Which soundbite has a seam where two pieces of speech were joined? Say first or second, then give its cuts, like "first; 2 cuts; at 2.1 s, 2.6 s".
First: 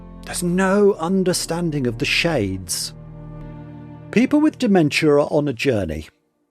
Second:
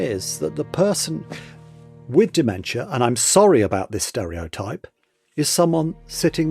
first; 1 cut; at 3.1 s